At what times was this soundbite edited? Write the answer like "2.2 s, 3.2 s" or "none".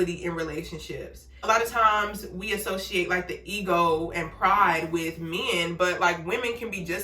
1.4 s